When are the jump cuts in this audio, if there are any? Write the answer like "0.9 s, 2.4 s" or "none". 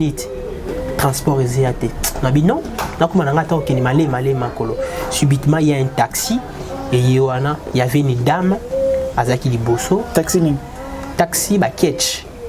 none